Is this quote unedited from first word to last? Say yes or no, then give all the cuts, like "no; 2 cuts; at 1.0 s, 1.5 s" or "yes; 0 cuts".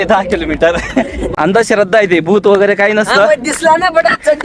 no; 1 cut; at 1.2 s